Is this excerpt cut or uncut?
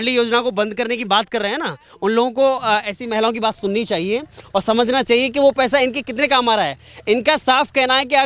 uncut